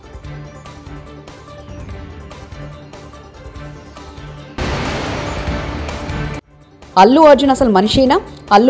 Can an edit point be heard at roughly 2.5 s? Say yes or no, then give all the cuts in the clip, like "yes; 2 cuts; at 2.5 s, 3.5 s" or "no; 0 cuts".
no; 2 cuts; at 4.6 s, 6.4 s